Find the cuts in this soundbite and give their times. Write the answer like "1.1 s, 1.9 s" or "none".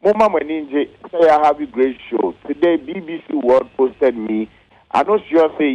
4.6 s